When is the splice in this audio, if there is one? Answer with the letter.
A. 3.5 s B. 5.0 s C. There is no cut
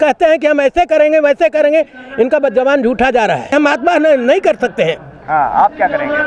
A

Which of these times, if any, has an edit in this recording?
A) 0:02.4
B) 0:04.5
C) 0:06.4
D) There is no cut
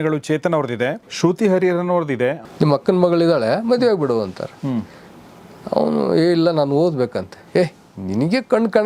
A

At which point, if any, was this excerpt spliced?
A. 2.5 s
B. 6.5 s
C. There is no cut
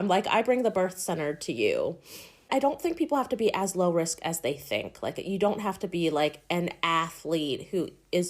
A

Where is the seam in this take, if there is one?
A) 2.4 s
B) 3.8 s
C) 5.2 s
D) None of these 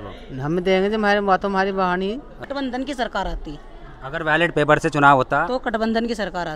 A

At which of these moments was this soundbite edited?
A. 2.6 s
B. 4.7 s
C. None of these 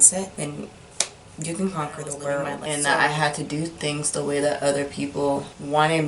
A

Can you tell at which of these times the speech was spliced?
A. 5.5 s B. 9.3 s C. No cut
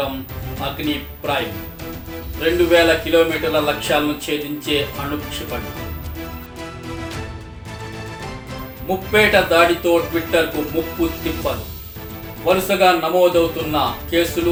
C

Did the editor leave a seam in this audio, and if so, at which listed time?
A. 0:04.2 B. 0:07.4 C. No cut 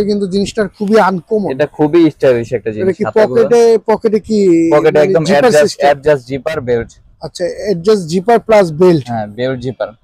C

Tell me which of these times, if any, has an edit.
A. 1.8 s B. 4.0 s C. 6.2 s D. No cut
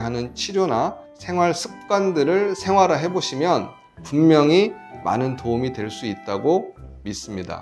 D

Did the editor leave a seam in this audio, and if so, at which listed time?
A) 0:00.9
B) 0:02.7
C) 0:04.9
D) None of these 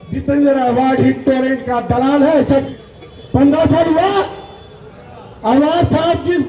B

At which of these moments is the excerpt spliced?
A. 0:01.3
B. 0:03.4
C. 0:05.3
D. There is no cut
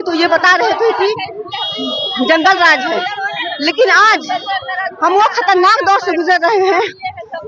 D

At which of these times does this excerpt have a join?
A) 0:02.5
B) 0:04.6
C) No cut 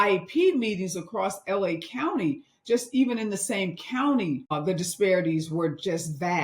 B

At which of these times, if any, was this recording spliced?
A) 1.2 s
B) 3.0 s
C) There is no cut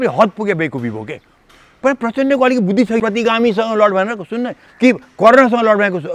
B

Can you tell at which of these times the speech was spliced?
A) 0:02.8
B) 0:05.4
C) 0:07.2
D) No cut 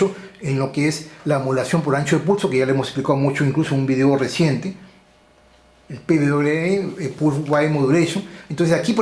D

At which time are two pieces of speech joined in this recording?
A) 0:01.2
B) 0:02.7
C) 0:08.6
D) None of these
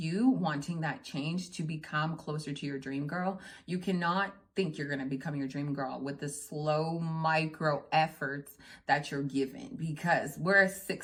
D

